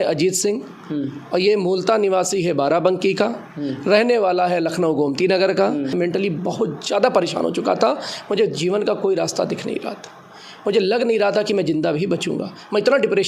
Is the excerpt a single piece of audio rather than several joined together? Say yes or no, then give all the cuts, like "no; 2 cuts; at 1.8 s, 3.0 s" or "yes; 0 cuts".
no; 1 cut; at 5.9 s